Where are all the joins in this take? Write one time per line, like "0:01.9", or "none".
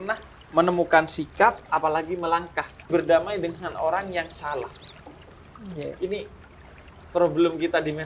0:02.9